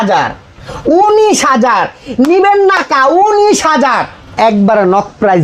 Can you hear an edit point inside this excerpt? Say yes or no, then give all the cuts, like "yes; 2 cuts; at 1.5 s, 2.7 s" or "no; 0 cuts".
yes; 1 cut; at 4.3 s